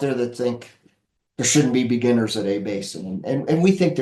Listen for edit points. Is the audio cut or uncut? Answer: uncut